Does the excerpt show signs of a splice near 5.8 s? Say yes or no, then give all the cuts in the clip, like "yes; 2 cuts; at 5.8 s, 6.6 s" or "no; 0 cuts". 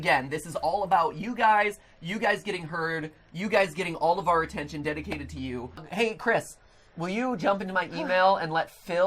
yes; 1 cut; at 5.8 s